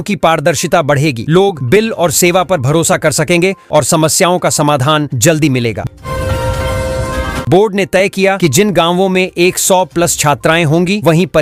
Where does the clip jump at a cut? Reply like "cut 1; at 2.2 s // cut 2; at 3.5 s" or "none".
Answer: none